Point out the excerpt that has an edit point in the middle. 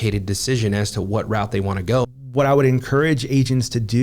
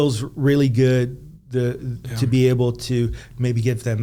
first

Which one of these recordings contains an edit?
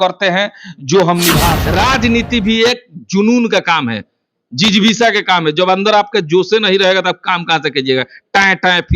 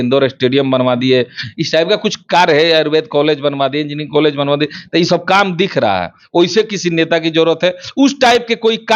first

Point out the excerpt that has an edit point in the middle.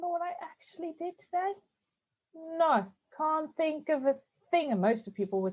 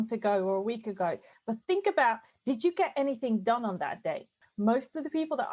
second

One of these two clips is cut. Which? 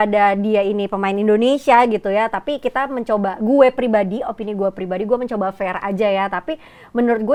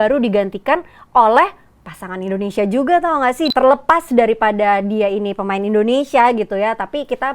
second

